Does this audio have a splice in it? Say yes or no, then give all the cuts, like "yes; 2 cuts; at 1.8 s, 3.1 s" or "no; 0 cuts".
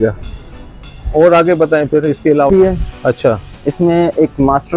yes; 1 cut; at 2.5 s